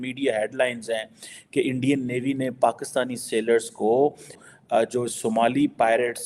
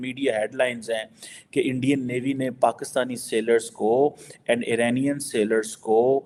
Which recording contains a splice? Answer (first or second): first